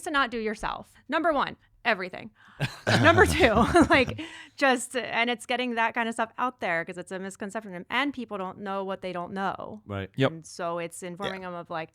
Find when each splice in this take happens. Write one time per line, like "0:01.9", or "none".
0:00.9